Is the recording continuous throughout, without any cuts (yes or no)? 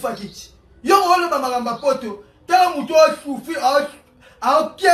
yes